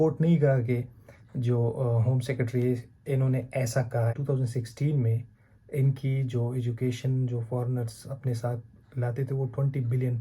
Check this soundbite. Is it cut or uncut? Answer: cut